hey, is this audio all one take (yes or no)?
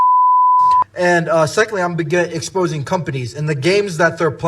no